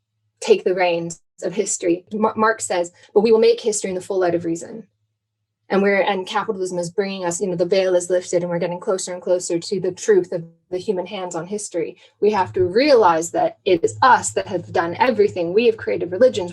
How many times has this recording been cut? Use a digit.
1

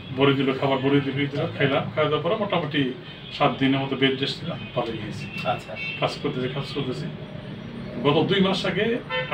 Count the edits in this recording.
0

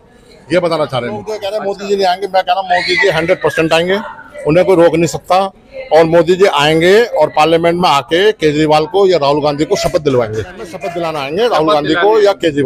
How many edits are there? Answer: 0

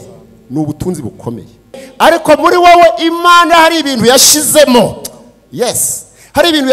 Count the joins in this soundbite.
1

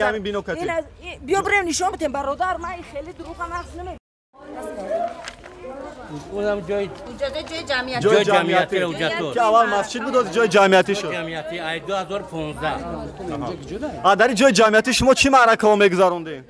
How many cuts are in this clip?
1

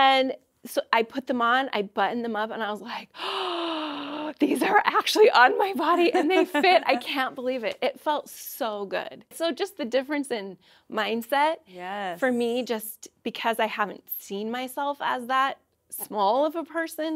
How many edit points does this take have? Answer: 1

